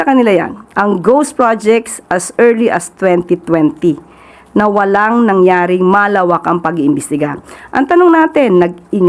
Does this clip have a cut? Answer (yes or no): no